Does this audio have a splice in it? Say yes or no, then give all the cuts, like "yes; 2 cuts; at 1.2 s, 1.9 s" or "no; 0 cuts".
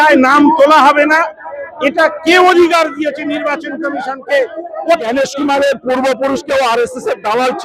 yes; 1 cut; at 5.0 s